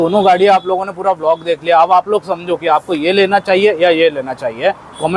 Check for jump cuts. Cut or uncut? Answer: uncut